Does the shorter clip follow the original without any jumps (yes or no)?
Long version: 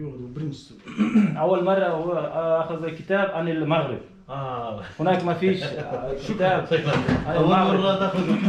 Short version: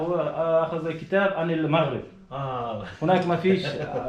yes